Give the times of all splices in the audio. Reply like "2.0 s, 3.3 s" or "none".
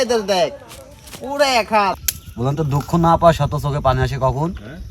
1.9 s